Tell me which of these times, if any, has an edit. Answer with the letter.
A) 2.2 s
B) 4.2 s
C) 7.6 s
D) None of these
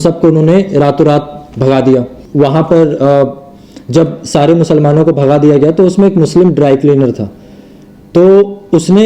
A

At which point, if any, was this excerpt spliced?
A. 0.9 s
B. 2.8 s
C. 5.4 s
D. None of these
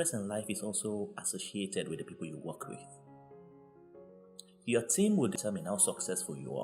C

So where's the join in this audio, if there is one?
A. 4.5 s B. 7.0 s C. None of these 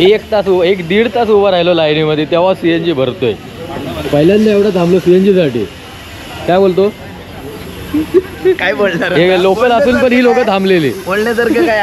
C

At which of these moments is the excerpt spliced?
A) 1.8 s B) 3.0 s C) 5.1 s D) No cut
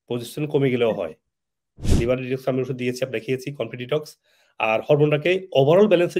A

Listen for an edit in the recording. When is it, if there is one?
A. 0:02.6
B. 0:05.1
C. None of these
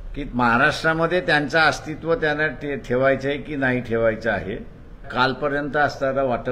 B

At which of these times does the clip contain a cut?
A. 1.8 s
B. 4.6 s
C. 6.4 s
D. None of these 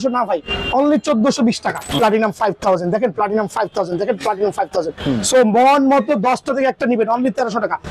A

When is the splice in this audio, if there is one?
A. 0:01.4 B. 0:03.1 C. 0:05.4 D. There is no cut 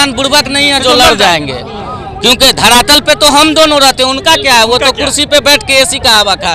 D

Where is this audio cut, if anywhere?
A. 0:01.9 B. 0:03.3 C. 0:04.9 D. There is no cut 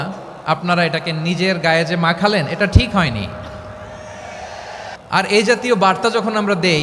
C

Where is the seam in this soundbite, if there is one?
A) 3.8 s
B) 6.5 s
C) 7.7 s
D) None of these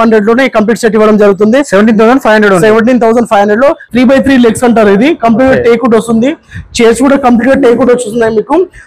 A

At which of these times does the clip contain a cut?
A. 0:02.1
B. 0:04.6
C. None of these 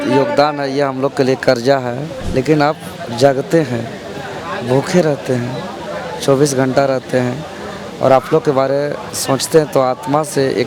A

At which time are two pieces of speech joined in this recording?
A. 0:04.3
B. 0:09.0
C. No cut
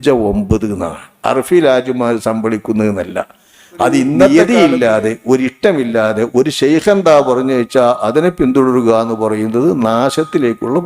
A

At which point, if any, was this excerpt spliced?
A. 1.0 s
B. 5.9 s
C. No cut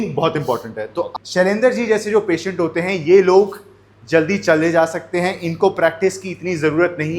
A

